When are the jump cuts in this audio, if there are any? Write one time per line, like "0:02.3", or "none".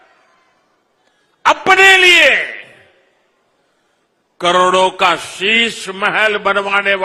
none

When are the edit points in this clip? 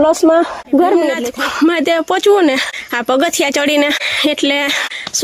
0:01.3

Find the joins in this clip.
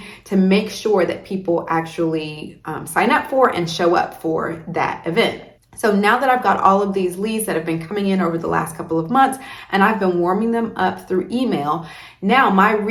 none

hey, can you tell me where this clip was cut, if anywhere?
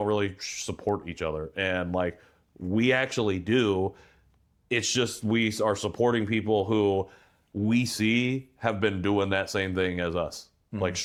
none

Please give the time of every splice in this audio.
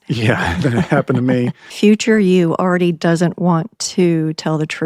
0:01.7

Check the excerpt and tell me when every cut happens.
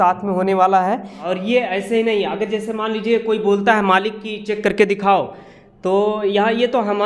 0:01.2

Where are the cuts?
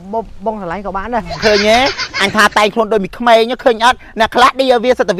0:01.4

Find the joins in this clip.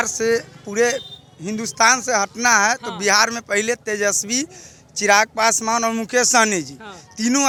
none

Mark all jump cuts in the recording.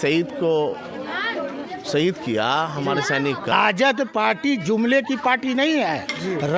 0:03.5

